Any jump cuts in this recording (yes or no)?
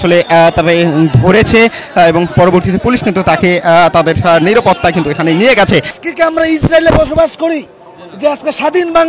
yes